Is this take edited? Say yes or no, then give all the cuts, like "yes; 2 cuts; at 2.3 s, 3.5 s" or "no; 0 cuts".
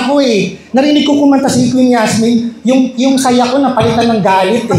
no; 0 cuts